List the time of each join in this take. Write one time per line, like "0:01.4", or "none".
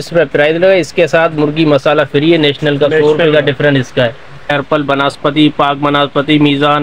0:04.5